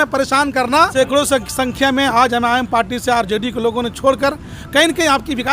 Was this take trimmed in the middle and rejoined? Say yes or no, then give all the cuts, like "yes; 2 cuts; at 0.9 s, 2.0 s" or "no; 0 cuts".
yes; 1 cut; at 0.9 s